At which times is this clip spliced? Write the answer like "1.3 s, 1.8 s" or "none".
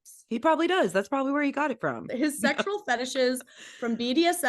2.1 s